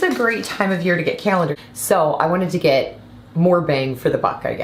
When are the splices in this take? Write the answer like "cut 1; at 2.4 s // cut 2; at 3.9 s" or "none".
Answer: cut 1; at 1.6 s